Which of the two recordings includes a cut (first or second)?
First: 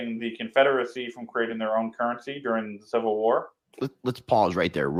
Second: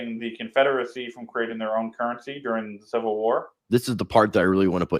second